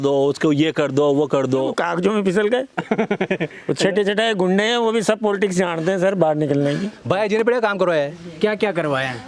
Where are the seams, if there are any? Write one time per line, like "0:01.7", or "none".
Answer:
0:01.8
0:07.0